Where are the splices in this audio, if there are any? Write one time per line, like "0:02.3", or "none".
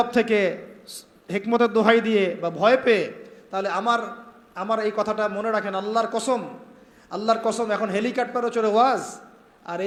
none

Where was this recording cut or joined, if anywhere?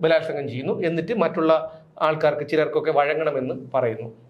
none

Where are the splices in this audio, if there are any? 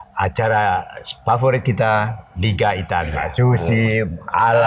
0:03.2

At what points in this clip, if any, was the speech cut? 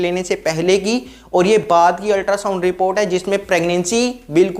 none

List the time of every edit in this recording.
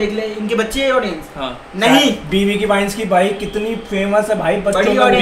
none

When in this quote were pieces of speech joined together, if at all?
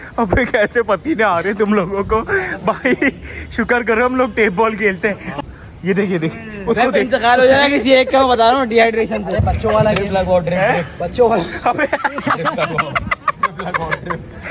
0:05.4

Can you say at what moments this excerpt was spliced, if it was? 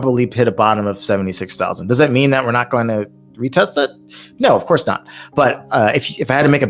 none

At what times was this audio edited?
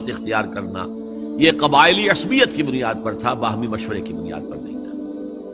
none

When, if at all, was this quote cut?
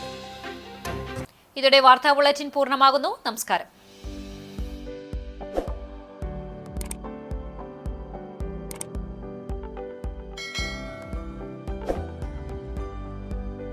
none

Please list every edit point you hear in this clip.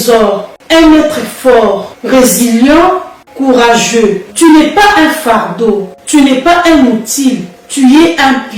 none

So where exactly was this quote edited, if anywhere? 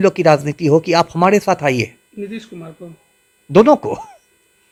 none

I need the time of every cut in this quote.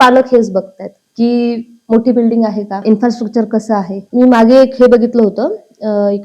0:02.8
0:04.0

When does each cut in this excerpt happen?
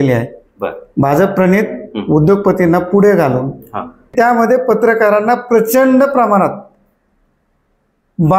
0:04.1

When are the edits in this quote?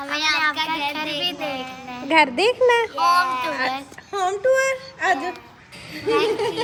none

